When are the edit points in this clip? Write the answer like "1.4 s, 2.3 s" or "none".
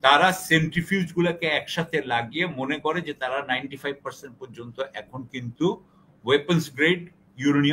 none